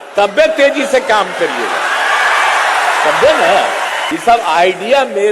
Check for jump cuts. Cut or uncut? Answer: cut